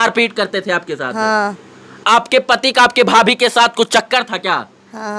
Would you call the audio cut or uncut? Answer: cut